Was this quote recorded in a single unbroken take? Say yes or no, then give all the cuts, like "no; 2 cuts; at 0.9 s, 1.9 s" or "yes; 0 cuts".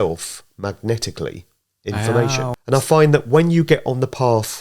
no; 1 cut; at 2.6 s